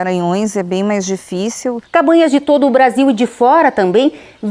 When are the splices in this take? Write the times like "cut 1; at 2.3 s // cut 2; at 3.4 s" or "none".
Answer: cut 1; at 1.8 s